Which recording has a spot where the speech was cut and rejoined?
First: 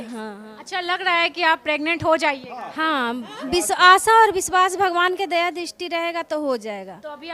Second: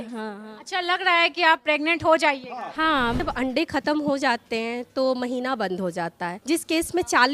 second; 2 cuts; at 3.2 s, 6.3 s

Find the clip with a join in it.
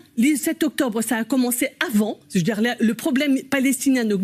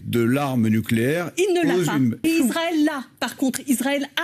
second; 1 cut; at 2.2 s

